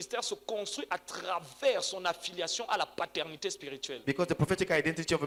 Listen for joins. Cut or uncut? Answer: uncut